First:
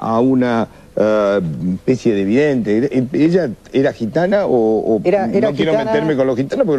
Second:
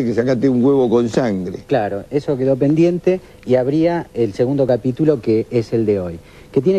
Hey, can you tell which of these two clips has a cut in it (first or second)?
second